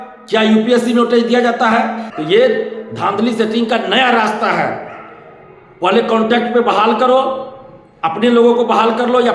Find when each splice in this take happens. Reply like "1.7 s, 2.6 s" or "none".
2.1 s

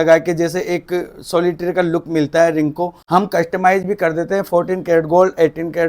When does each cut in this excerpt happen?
3.0 s

